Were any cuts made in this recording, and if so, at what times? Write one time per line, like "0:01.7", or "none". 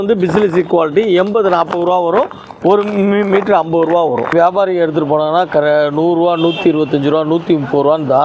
0:04.3